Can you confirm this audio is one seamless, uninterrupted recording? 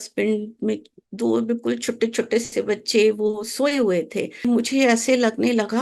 no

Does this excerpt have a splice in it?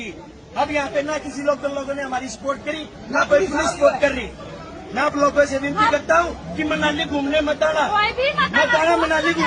no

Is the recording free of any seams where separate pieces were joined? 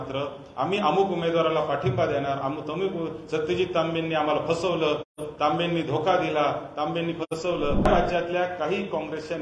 no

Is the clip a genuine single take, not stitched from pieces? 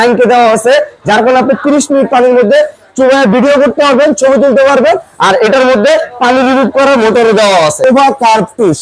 no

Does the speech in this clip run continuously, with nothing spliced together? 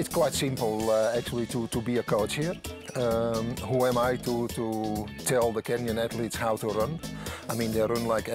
yes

